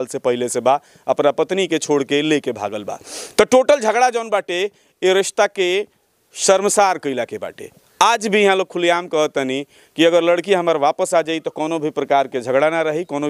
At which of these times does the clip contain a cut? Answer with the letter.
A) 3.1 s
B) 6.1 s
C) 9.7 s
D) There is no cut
D